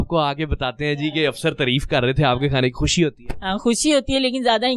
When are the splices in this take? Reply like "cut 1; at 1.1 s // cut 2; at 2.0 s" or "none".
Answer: none